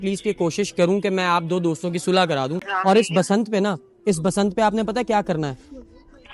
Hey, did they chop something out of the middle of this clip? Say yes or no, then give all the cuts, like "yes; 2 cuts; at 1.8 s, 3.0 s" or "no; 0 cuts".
yes; 1 cut; at 2.7 s